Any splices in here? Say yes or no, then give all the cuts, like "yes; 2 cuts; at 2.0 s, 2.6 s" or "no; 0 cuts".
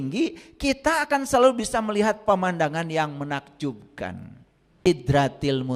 yes; 1 cut; at 4.9 s